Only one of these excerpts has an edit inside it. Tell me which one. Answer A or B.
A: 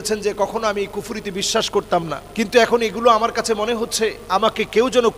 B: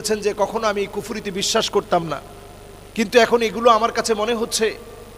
A